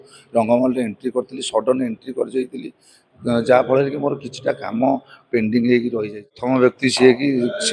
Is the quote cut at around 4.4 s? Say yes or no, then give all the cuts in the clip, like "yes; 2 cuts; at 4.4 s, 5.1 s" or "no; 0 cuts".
no; 1 cut; at 6.4 s